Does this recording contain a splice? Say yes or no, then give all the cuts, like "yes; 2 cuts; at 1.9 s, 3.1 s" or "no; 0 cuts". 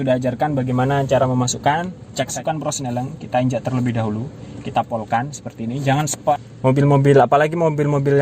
yes; 2 cuts; at 2.3 s, 6.4 s